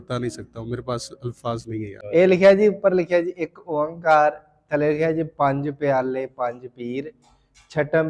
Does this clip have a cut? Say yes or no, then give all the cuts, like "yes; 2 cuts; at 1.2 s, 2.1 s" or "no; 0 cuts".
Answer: yes; 1 cut; at 2.0 s